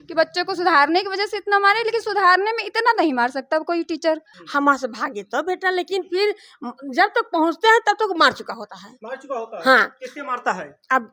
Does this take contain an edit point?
yes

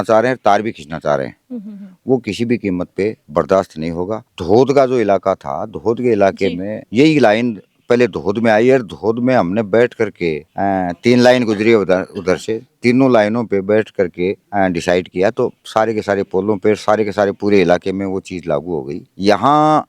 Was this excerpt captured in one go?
yes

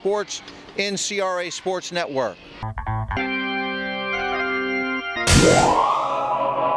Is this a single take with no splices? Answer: no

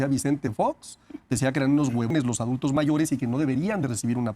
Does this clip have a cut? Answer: yes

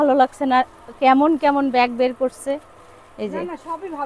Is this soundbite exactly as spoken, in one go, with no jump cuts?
yes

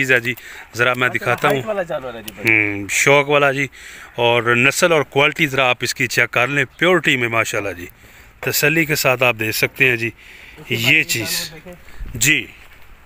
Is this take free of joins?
yes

